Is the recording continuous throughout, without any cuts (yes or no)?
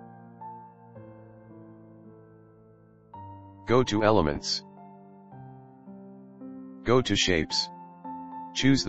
no